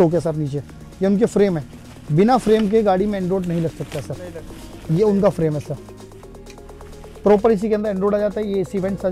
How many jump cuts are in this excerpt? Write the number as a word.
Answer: zero